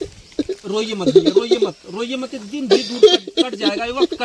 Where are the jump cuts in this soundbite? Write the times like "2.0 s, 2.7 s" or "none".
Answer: none